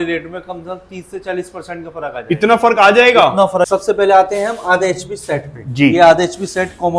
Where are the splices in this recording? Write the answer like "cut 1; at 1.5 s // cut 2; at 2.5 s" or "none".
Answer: cut 1; at 3.7 s